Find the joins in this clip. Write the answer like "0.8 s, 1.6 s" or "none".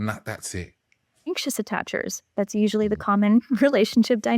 1.3 s